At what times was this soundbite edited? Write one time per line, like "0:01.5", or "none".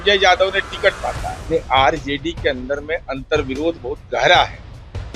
0:01.3

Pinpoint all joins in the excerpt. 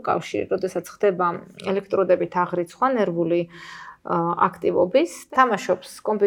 0:05.2

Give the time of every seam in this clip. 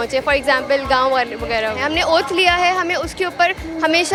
none

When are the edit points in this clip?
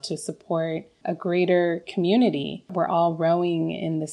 0:02.7

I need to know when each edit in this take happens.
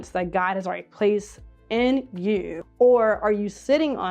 0:02.6

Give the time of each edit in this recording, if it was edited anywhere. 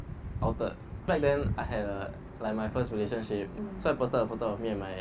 none

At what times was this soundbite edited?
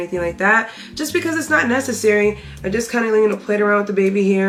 none

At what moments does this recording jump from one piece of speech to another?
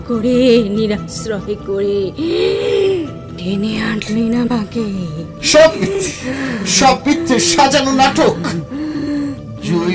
none

